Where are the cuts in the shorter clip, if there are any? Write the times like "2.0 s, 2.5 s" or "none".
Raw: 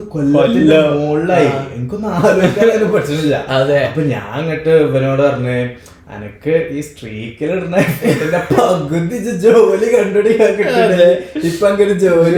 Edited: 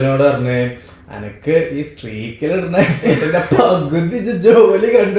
none